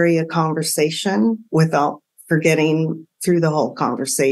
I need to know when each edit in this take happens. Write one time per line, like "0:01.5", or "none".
none